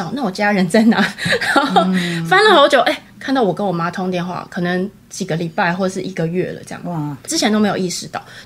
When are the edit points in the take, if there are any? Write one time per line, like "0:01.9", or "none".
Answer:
none